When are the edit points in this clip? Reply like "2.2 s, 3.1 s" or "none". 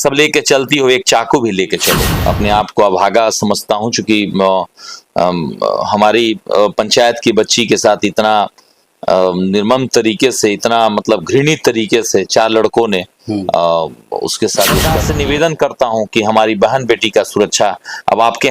1.8 s, 14.9 s